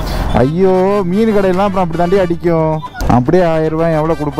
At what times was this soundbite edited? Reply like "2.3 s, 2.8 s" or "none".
2.9 s